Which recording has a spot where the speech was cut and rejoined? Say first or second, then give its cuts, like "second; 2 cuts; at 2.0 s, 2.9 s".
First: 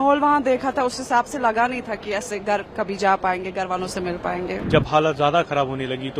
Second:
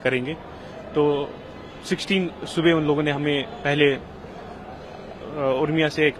first; 1 cut; at 4.6 s